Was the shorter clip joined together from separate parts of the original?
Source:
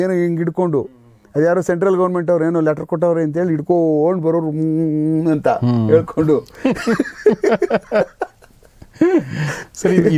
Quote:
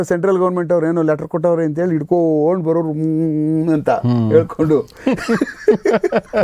no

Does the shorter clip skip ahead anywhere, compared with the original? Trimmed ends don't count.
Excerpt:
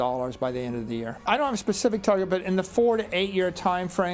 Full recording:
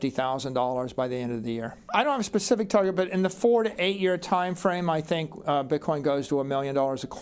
yes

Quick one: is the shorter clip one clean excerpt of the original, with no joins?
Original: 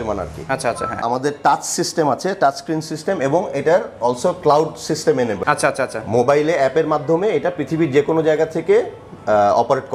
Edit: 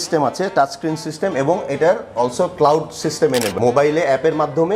no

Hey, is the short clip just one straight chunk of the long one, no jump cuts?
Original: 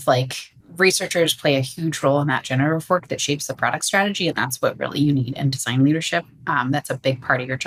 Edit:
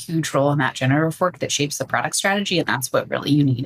yes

